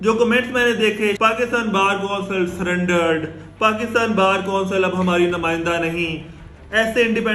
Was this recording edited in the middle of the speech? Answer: yes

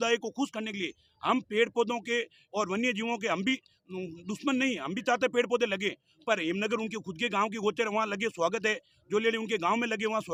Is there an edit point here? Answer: no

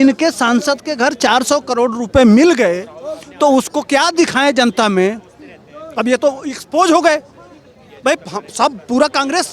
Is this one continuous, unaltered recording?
yes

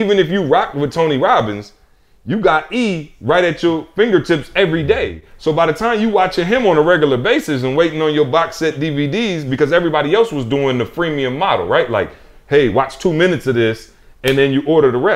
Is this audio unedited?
yes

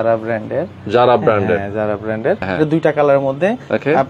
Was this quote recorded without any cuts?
no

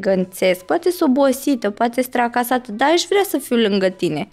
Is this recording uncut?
yes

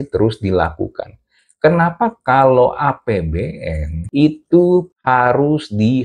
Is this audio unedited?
no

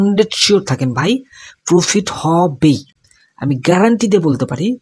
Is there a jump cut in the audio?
no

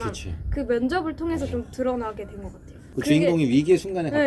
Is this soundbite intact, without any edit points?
no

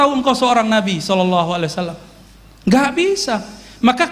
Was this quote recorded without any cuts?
yes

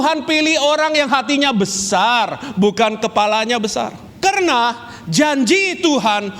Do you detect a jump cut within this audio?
yes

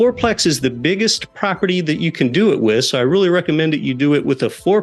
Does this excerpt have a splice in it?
no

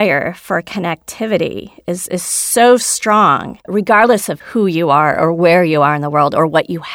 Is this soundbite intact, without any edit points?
no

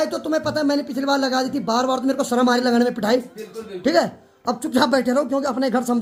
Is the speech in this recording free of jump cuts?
yes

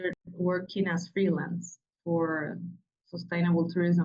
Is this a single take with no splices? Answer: yes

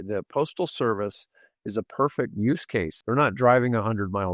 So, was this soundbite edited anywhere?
yes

